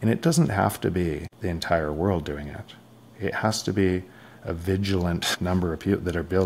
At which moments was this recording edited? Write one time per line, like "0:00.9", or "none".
0:01.3
0:05.3